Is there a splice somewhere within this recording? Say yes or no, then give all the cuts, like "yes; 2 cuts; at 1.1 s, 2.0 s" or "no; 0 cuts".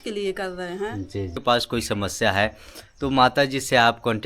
yes; 1 cut; at 1.4 s